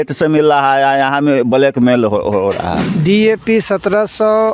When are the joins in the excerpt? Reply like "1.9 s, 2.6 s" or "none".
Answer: 2.8 s